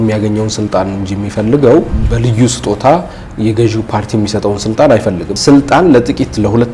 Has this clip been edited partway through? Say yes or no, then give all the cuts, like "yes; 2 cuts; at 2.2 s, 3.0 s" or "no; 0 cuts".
yes; 2 cuts; at 2.0 s, 5.3 s